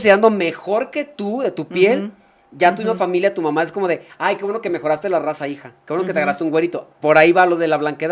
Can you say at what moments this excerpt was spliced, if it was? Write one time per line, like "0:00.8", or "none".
none